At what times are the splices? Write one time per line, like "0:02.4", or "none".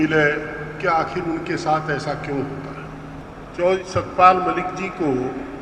0:03.2